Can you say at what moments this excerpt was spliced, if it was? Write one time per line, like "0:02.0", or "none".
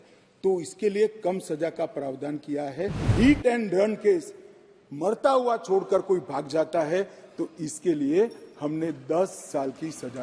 0:03.1